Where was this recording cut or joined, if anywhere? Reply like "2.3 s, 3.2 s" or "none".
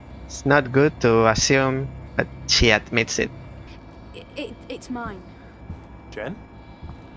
3.7 s, 5.6 s